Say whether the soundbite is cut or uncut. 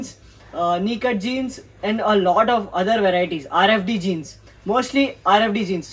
uncut